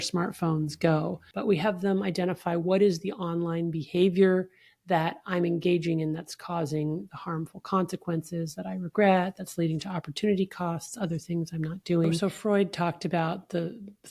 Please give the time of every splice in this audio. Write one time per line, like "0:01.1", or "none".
0:01.2
0:12.2